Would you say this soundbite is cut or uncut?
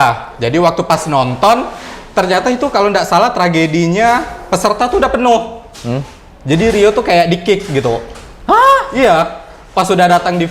uncut